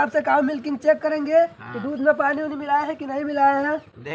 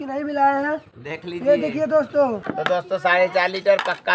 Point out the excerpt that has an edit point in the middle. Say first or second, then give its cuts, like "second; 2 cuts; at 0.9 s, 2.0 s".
second; 1 cut; at 2.5 s